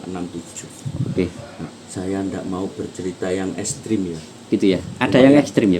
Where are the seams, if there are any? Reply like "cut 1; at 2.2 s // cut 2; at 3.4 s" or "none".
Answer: cut 1; at 1.7 s